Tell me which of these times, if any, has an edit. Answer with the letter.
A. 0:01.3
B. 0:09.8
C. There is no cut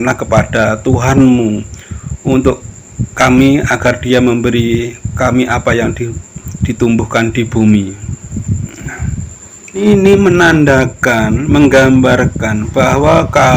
B